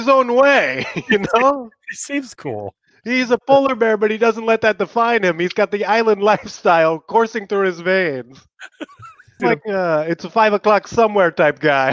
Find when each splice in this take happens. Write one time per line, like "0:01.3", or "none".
0:09.4